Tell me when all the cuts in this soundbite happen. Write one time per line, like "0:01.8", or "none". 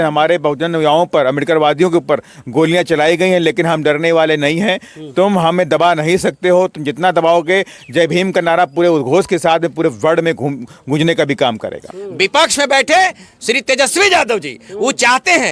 0:11.9